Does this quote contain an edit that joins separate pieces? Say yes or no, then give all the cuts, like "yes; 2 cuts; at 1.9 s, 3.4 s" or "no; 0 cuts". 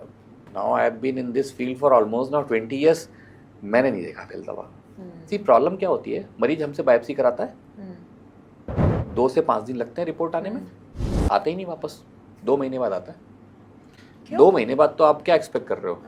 no; 0 cuts